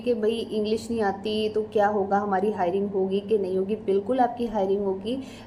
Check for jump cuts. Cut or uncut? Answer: uncut